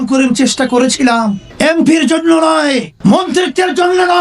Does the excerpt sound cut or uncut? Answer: cut